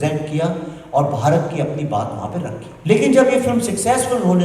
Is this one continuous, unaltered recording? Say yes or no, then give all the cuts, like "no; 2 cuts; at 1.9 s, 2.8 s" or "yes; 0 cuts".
no; 1 cut; at 2.7 s